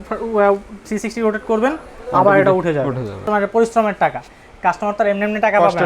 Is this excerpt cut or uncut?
cut